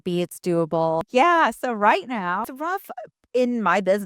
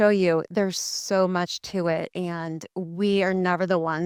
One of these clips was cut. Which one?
first; 2 cuts; at 1.1 s, 2.5 s

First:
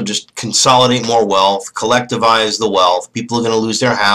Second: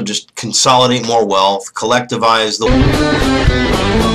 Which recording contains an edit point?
first; 1 cut; at 2.7 s

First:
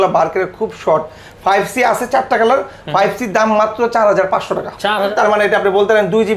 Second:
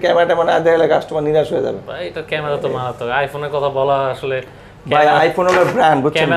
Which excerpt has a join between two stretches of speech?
first; 1 cut; at 5.1 s

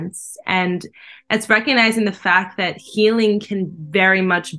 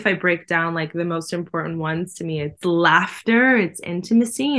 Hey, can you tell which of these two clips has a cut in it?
second; 1 cut; at 2.6 s

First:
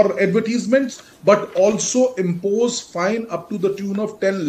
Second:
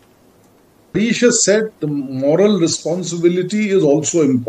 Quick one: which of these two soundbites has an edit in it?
second; 1 cut; at 0.9 s

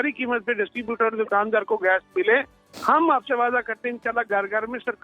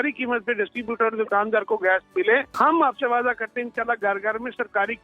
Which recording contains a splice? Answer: second; 1 cut; at 2.5 s

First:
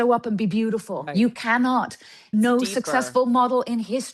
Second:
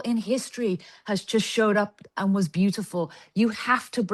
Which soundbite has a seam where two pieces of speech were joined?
first; 2 cuts; at 1.0 s, 2.3 s

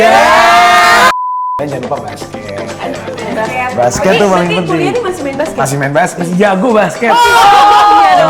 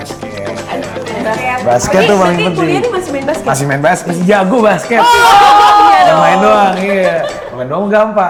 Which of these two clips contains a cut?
first; 1 cut; at 1.1 s

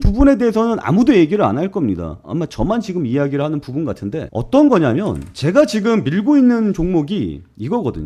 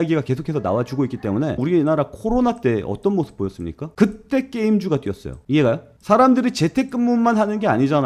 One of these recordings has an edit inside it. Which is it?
second; 2 cuts; at 1.6 s, 3.9 s

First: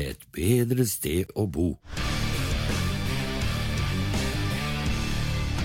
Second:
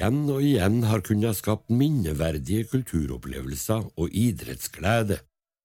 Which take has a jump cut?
first; 1 cut; at 2.1 s

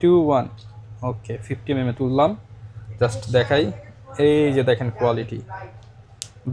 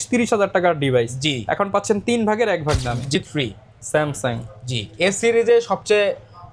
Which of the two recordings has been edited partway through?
second; 1 cut; at 3.2 s

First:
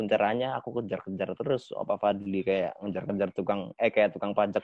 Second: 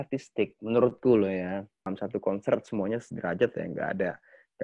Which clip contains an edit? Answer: second; 1 cut; at 1.9 s

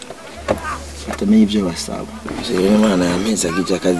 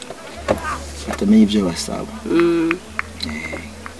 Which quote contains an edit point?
first; 1 cut; at 2.2 s

